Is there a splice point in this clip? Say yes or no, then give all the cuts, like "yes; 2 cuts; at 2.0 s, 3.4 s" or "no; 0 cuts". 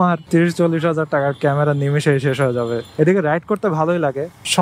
yes; 1 cut; at 2.9 s